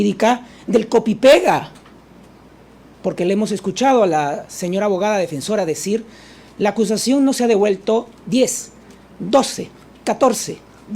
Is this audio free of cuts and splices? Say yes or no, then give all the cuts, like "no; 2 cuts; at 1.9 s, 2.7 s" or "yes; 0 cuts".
no; 1 cut; at 2.8 s